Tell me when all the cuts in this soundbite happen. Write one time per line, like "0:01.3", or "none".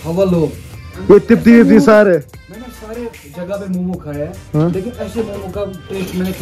none